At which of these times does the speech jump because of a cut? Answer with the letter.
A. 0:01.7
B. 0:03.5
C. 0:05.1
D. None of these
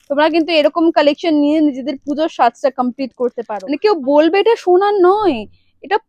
B